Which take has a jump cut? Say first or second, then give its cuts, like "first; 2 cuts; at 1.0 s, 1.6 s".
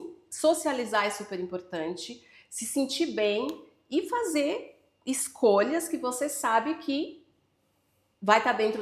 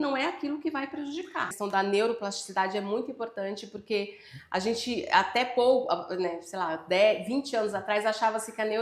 second; 1 cut; at 1.4 s